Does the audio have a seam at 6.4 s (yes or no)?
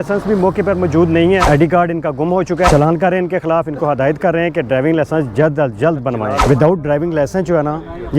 yes